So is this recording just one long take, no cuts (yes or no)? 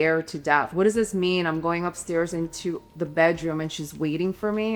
yes